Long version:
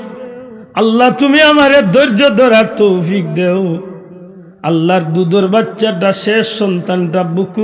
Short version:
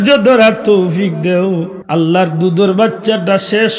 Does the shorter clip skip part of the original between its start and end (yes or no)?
yes